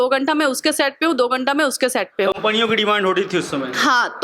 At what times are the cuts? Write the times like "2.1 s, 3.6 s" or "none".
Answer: none

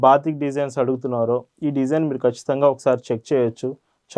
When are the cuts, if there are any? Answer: none

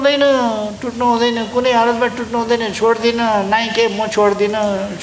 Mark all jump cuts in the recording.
none

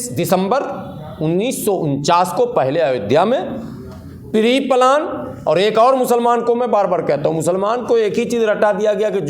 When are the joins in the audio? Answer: none

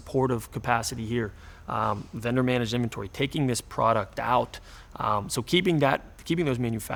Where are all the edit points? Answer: none

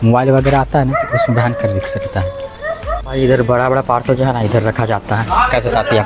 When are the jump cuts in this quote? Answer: 3.0 s

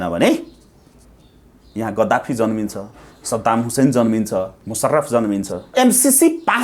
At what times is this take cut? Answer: 4.6 s, 5.7 s

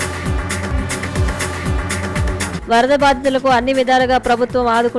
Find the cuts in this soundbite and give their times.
2.5 s

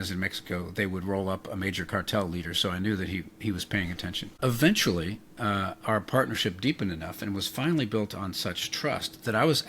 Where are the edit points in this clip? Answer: 4.4 s

